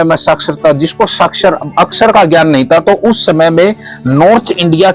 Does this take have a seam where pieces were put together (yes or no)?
no